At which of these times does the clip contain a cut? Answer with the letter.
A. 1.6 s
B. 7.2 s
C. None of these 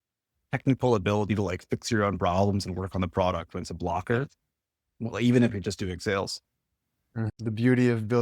B